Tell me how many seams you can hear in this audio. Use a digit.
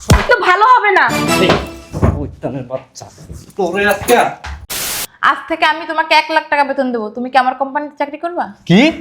1